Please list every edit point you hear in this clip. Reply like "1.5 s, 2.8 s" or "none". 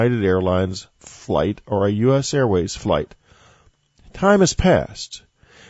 2.0 s